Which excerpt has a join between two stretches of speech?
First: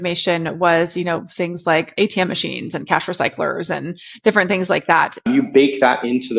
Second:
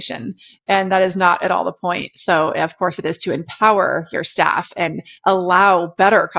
first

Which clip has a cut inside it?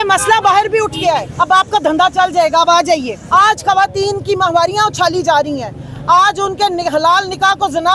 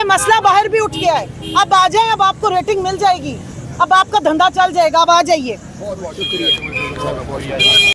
first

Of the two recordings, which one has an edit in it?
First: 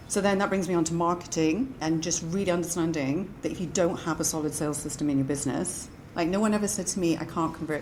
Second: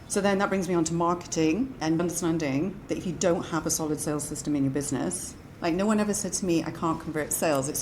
second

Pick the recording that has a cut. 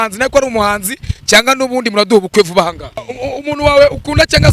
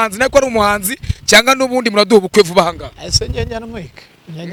first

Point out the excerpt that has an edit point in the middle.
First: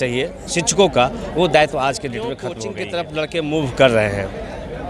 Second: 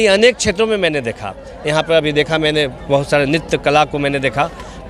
first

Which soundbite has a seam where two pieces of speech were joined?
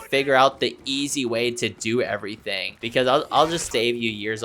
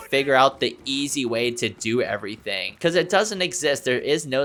first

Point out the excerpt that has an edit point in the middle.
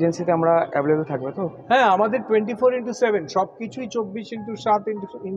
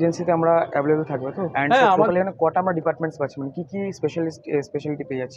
second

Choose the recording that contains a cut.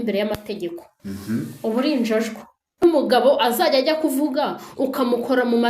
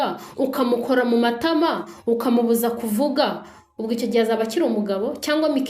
first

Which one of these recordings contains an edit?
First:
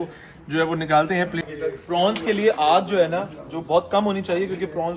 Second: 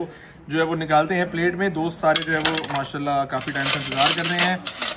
first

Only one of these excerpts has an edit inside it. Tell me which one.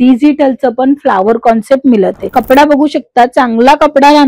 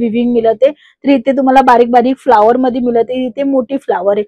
first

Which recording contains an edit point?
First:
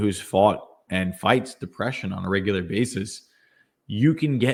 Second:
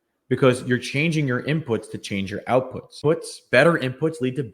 second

